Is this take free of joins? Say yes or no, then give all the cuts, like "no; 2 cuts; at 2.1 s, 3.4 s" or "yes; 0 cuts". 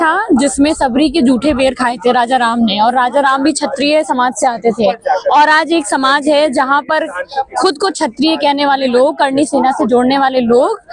yes; 0 cuts